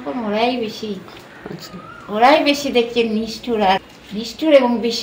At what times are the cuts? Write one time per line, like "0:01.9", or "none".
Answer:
0:03.9